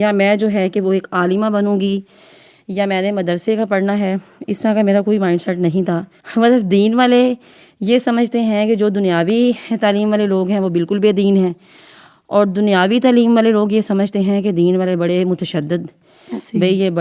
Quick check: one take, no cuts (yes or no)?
no